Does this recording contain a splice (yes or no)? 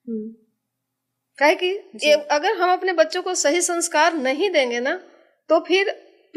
no